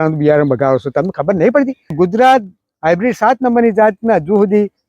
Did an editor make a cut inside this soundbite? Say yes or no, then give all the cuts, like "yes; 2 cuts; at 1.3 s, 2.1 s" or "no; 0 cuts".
yes; 1 cut; at 1.9 s